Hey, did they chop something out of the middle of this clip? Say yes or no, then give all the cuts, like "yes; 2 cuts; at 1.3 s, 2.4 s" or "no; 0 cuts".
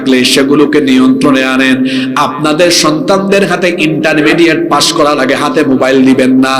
no; 0 cuts